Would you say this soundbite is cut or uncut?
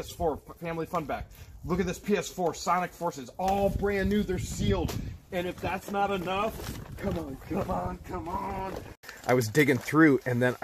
cut